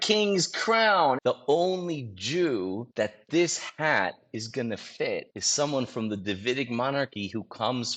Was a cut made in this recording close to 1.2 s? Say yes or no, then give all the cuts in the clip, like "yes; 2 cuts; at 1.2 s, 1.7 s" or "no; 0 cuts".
yes; 3 cuts; at 1.2 s, 2.8 s, 5.4 s